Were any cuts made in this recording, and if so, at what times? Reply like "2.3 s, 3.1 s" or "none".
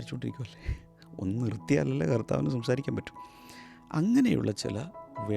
none